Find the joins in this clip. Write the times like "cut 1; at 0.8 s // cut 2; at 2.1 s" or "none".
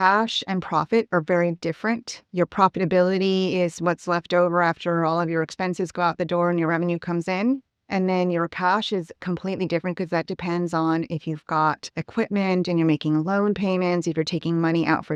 none